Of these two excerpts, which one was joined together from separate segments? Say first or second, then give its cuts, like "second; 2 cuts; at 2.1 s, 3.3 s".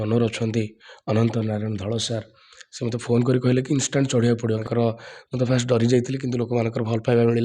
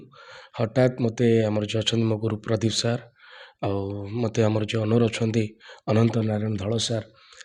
first; 1 cut; at 4.6 s